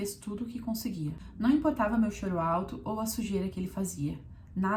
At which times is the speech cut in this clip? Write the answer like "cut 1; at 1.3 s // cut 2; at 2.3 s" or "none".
none